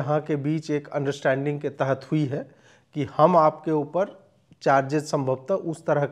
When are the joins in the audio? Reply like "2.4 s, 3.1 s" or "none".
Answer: none